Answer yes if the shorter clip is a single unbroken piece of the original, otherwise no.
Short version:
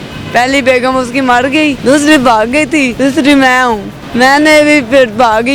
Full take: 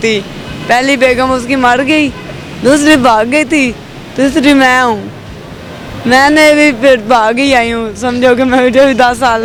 no